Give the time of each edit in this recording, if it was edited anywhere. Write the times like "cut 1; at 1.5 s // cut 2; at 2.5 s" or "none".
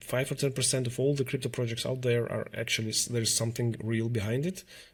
none